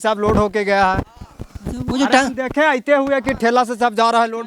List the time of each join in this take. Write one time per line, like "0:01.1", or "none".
none